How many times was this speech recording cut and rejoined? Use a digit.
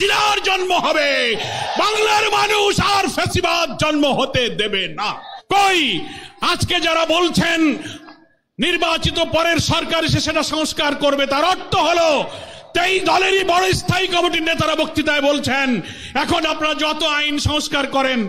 1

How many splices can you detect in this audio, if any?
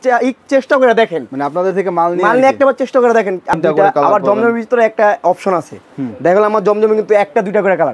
1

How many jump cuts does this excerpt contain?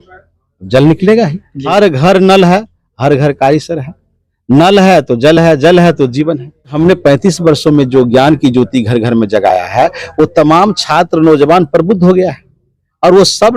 2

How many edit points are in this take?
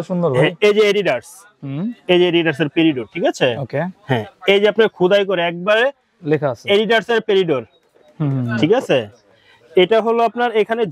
0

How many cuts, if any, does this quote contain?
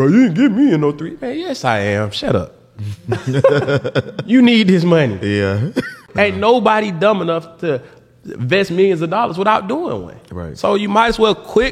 1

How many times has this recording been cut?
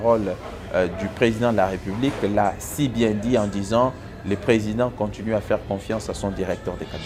0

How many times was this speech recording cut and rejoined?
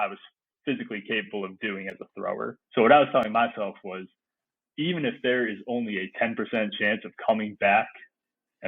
1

